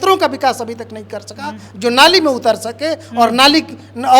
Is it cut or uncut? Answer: uncut